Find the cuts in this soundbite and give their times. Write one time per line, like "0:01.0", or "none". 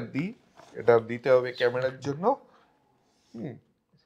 none